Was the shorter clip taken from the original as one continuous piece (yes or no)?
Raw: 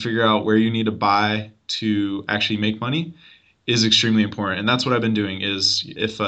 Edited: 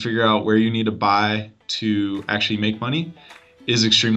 yes